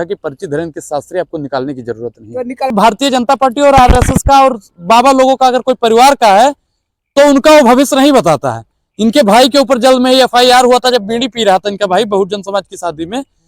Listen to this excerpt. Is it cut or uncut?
cut